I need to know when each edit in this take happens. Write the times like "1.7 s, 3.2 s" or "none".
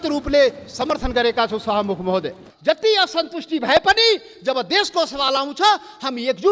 2.4 s